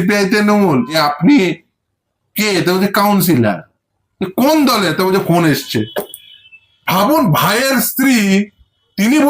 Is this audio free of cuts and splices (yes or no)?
no